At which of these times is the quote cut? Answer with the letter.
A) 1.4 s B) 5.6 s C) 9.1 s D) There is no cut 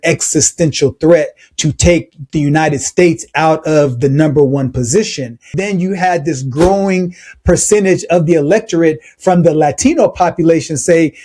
B